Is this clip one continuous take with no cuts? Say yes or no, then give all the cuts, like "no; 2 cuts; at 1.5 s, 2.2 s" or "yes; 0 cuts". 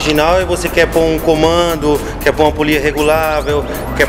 yes; 0 cuts